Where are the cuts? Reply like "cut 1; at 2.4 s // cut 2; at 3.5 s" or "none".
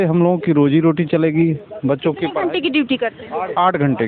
none